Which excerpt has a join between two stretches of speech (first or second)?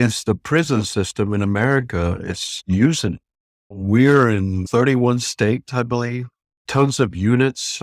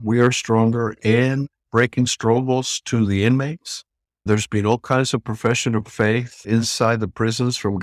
first